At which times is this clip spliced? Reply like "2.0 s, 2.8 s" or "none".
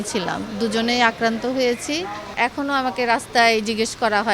2.3 s